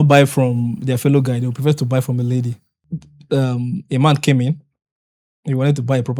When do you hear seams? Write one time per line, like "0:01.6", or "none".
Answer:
0:02.7